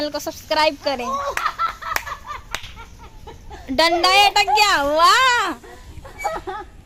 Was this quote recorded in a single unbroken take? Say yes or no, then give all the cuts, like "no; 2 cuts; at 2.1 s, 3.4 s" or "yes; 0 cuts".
yes; 0 cuts